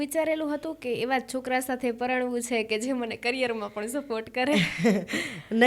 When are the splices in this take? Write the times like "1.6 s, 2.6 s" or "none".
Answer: none